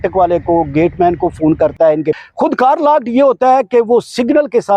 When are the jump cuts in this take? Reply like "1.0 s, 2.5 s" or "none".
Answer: 2.2 s